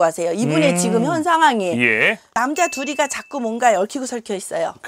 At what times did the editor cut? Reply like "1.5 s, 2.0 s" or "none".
2.3 s